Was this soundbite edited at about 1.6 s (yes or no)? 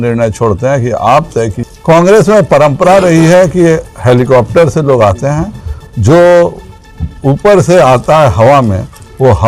yes